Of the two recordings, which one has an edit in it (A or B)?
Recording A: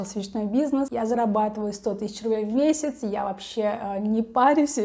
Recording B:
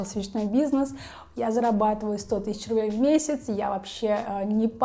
A